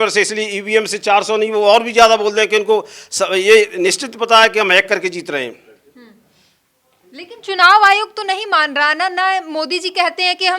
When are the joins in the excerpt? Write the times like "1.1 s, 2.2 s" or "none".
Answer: none